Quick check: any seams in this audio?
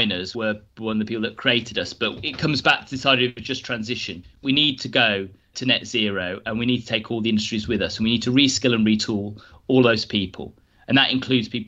no; 0 cuts

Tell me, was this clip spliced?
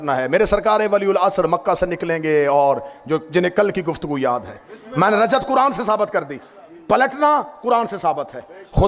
no; 0 cuts

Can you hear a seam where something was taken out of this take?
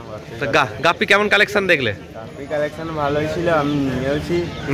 no; 0 cuts

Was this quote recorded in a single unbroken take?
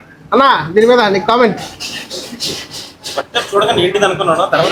yes; 0 cuts

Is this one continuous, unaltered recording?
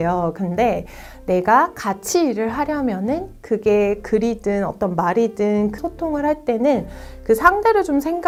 yes; 0 cuts

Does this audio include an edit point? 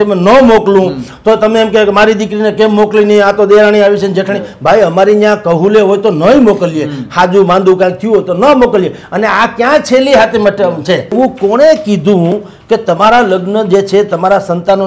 yes; 1 cut; at 11.1 s

